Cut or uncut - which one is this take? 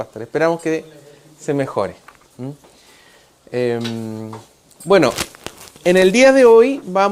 cut